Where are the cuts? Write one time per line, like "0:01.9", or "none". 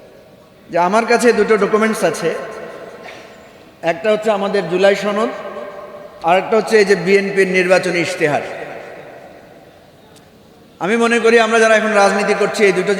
none